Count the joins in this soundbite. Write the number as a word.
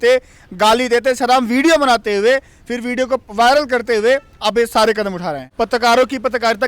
one